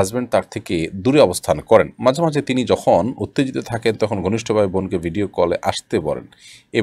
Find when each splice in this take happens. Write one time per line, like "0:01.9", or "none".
none